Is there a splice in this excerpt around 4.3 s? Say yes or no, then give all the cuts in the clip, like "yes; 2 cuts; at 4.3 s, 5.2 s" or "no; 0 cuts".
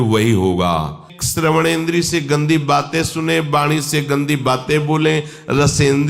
no; 1 cut; at 1.1 s